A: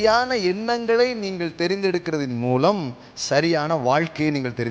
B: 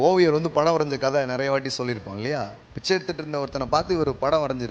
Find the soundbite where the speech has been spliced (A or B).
B